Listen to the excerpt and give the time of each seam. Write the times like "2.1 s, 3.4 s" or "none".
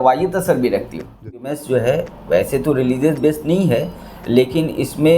1.4 s